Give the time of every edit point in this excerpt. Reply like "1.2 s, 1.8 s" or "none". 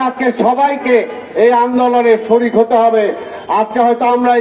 none